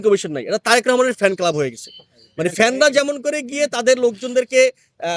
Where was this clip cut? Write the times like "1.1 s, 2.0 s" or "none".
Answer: none